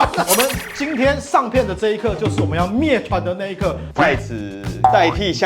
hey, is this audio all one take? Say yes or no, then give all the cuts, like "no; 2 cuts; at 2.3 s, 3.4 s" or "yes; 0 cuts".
no; 1 cut; at 3.9 s